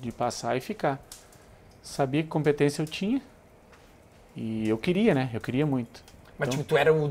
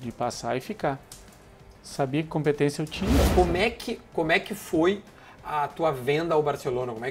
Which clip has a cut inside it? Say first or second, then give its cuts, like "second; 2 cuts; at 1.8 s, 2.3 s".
second; 1 cut; at 3.3 s